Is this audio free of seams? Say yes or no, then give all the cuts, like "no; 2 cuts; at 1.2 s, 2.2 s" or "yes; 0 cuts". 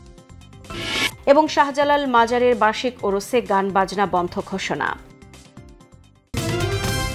no; 1 cut; at 6.2 s